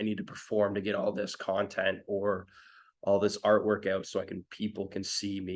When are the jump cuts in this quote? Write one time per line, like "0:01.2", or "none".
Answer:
none